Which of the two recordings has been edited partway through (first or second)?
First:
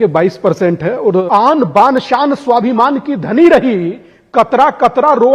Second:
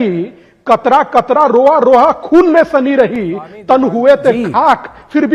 first